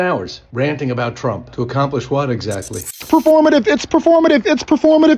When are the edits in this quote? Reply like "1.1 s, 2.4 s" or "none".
3.0 s